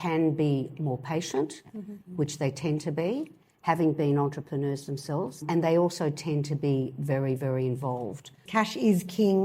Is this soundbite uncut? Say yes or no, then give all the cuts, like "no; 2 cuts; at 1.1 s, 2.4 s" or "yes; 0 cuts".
no; 2 cuts; at 5.4 s, 8.4 s